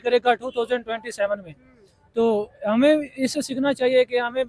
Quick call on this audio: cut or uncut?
uncut